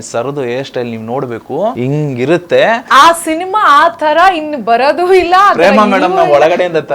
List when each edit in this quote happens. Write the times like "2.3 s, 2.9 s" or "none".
1.8 s, 2.9 s

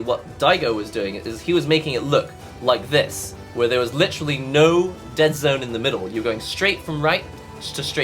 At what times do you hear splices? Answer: none

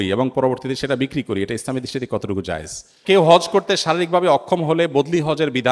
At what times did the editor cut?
3.0 s

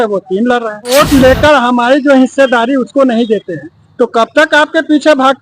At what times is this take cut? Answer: 0.9 s

